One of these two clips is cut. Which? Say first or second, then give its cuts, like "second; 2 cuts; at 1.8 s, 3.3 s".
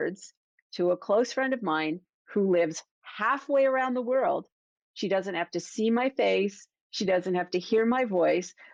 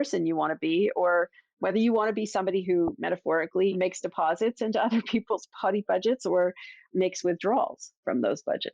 second; 2 cuts; at 3.7 s, 6.8 s